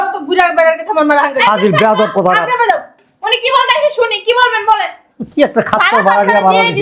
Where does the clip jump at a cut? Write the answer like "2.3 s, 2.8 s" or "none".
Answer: none